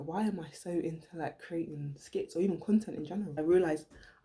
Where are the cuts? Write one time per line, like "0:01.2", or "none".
0:03.3

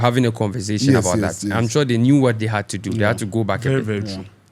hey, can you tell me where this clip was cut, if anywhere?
none

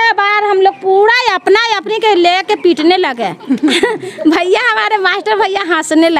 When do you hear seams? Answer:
none

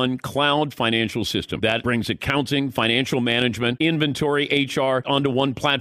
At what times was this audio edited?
0:01.8
0:03.8
0:05.0

